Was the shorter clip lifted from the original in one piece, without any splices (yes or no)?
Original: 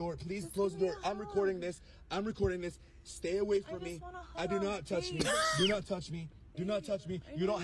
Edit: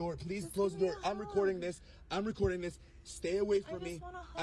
yes